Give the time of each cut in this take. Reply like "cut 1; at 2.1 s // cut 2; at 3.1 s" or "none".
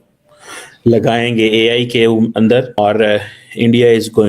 cut 1; at 2.8 s